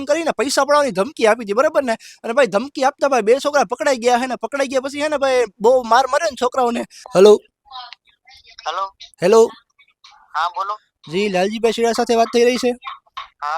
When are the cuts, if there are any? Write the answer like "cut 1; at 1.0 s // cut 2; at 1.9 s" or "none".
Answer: cut 1; at 2.0 s // cut 2; at 6.9 s